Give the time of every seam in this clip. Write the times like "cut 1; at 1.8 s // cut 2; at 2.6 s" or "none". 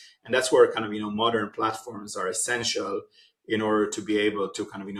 none